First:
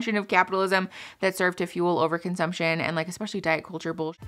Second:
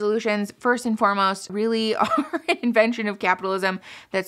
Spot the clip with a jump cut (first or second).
second